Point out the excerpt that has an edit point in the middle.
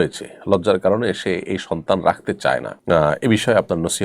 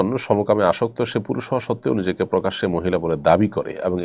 first; 1 cut; at 2.7 s

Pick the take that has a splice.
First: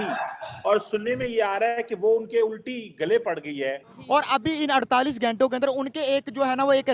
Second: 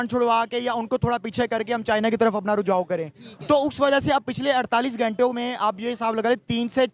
first; 1 cut; at 3.9 s

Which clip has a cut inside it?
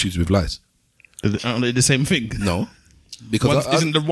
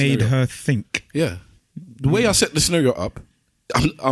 second; 1 cut; at 1.5 s

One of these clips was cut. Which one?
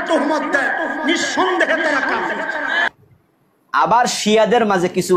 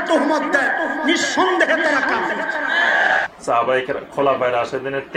first; 1 cut; at 2.9 s

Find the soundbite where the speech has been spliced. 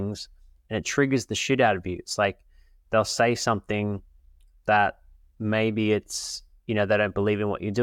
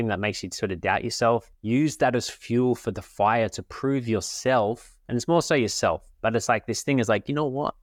second; 1 cut; at 1.5 s

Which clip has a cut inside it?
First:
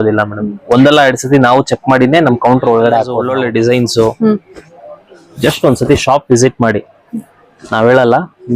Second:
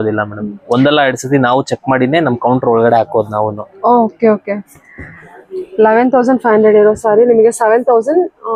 first; 1 cut; at 3.2 s

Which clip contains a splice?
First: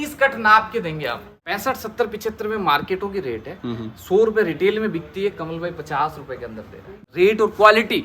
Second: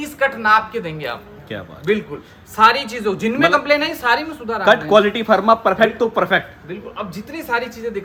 first; 2 cuts; at 1.3 s, 7.1 s

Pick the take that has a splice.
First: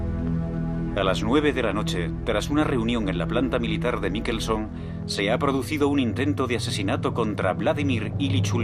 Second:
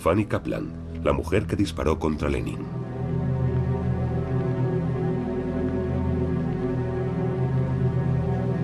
first; 1 cut; at 7.6 s

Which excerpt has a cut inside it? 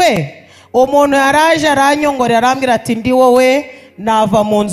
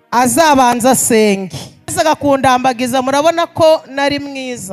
second; 1 cut; at 1.9 s

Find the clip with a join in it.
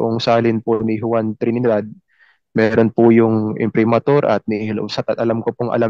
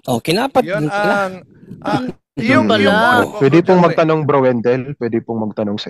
second; 1 cut; at 3.2 s

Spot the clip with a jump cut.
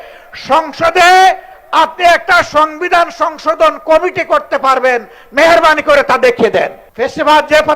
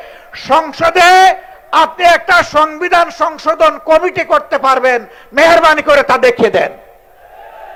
first; 1 cut; at 6.8 s

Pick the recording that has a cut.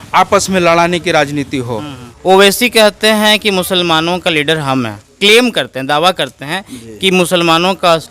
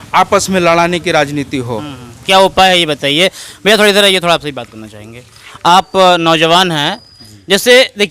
first; 1 cut; at 2.0 s

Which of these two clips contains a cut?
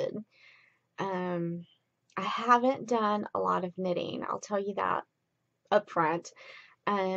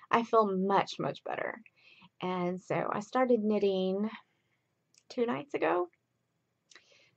first; 1 cut; at 3.2 s

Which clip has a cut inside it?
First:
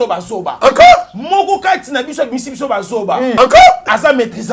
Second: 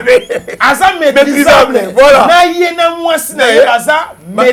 first; 1 cut; at 3.4 s

